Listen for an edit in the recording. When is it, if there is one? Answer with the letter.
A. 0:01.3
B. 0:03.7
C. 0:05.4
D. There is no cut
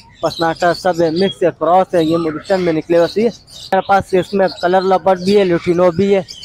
B